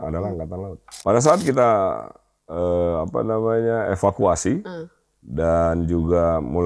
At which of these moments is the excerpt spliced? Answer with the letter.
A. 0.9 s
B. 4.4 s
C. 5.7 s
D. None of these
A